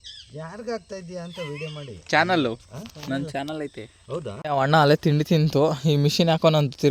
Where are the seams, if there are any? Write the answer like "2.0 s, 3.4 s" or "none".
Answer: 4.4 s